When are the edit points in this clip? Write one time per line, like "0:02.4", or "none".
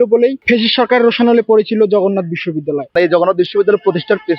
0:02.9